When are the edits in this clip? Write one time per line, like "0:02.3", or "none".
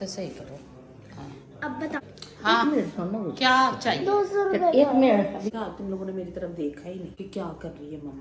0:02.0
0:05.5
0:07.1